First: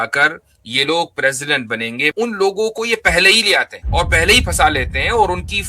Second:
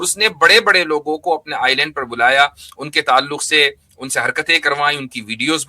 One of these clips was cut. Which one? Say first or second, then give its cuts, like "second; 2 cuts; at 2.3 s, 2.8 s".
first; 2 cuts; at 2.1 s, 3.8 s